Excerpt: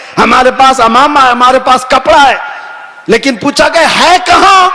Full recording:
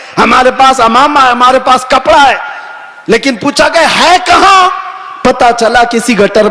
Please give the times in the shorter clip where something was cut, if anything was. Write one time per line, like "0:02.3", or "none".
none